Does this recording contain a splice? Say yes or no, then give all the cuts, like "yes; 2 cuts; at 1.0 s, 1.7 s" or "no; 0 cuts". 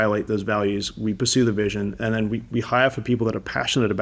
no; 0 cuts